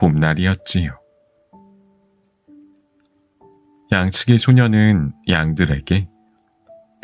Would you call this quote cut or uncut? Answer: uncut